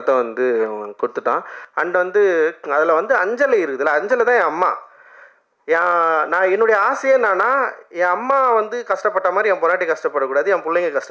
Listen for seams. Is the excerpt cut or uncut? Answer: cut